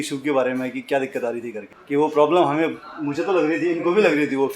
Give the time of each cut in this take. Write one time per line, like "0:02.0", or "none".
0:01.7